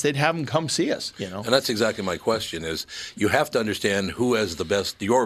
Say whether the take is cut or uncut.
uncut